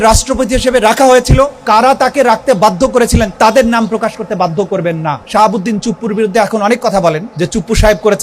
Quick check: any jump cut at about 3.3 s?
yes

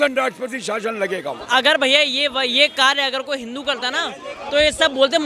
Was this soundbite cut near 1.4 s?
yes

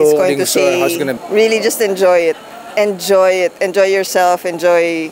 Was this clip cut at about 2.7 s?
no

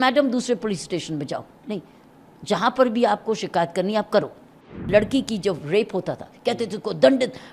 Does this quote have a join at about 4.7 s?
yes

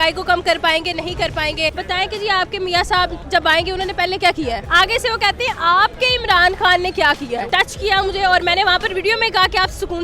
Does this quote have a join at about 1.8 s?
yes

